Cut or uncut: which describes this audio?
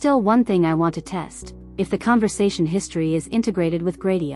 uncut